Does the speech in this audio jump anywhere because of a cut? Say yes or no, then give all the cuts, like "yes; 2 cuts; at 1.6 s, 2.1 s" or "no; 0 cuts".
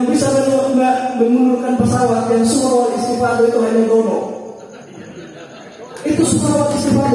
no; 0 cuts